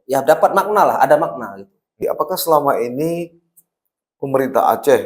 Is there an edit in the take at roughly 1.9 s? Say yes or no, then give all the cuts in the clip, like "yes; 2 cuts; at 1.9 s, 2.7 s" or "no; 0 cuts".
yes; 1 cut; at 1.9 s